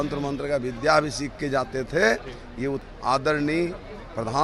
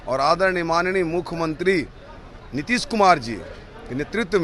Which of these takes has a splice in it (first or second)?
first